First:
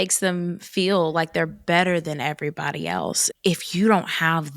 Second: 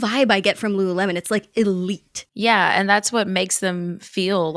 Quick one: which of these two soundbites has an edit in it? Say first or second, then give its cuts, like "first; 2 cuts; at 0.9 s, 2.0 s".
first; 1 cut; at 3.2 s